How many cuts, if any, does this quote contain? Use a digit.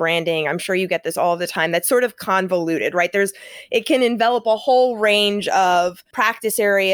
1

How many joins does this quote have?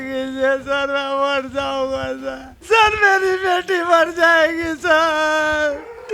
1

